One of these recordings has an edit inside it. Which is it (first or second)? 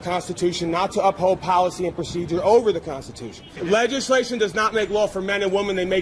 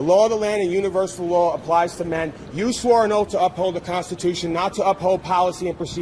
first